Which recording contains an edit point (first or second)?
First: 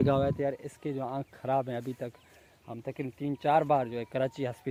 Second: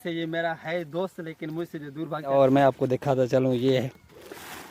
second